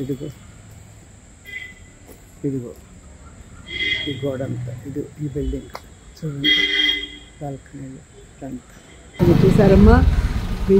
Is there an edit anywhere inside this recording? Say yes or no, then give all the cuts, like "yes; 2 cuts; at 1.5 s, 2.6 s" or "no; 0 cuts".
yes; 1 cut; at 9.2 s